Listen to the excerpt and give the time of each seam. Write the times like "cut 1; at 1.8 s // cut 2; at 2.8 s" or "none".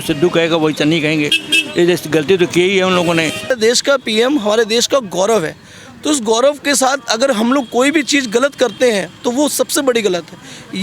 cut 1; at 3.5 s